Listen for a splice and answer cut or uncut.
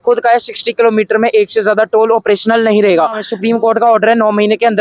cut